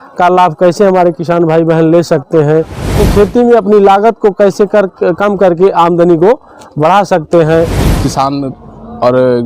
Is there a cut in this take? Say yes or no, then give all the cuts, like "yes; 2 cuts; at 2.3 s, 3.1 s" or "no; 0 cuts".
yes; 2 cuts; at 2.9 s, 7.8 s